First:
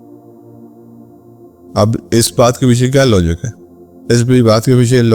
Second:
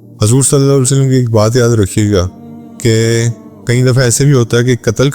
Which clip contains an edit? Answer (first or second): first